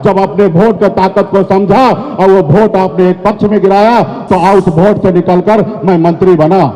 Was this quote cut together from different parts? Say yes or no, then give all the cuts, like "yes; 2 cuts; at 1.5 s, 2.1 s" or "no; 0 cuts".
no; 0 cuts